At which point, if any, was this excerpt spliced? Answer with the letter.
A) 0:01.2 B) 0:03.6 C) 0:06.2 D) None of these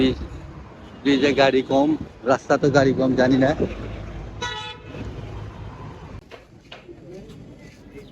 C